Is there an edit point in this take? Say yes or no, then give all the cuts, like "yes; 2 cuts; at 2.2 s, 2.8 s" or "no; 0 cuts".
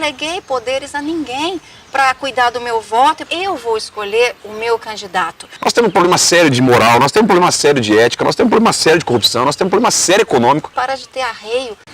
yes; 2 cuts; at 5.4 s, 10.7 s